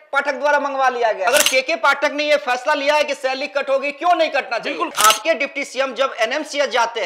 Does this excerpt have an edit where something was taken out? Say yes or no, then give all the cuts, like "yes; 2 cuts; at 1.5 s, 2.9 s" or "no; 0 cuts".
yes; 2 cuts; at 1.3 s, 5.0 s